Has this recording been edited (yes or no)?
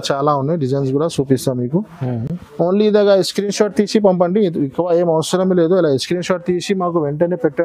no